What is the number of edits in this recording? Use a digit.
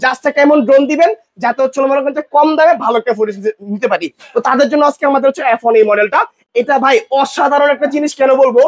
0